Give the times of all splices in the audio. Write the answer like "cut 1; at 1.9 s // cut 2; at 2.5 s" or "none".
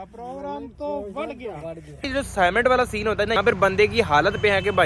cut 1; at 2.0 s // cut 2; at 3.4 s

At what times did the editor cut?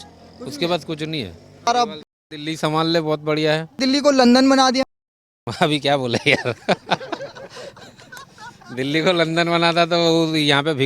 cut 1; at 1.7 s // cut 2; at 3.7 s

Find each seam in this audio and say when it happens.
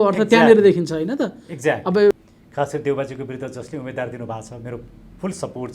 cut 1; at 2.1 s

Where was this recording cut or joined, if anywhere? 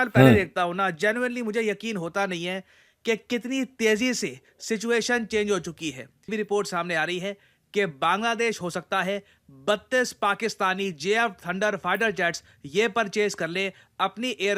cut 1; at 6.3 s

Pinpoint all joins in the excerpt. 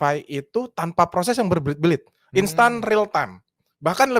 none

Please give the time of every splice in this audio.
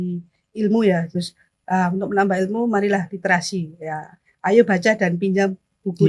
cut 1; at 1.1 s

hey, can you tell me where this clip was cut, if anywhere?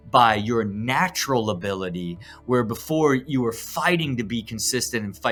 none

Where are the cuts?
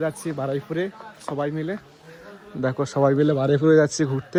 none

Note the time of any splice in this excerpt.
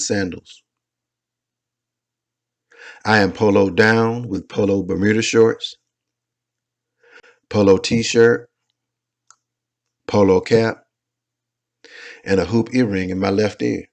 cut 1; at 5.3 s

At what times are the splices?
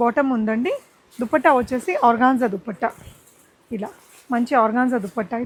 none

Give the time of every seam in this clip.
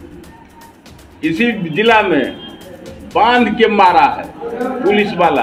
none

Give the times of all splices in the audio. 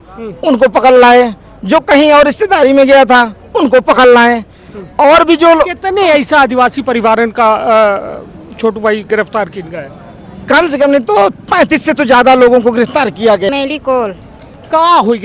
cut 1; at 13.5 s

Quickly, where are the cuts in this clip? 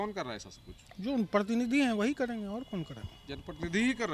none

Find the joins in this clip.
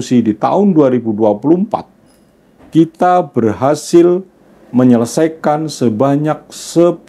none

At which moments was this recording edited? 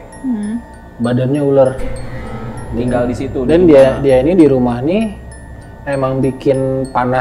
none

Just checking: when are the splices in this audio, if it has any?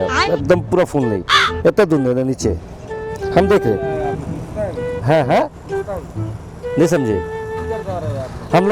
none

